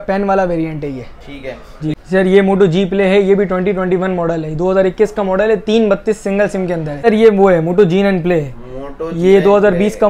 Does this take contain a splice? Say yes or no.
yes